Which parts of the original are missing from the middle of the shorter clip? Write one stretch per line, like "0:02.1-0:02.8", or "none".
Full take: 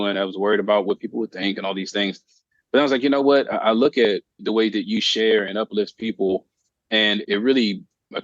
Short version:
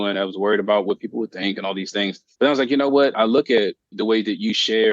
0:02.2-0:02.6
0:03.5-0:03.6